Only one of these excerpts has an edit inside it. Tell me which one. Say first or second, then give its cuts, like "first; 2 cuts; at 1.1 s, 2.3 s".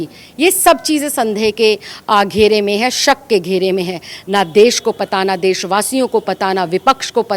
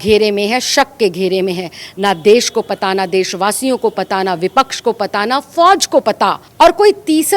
second; 1 cut; at 6.4 s